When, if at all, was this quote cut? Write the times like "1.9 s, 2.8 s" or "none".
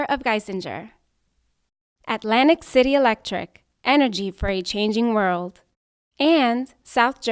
none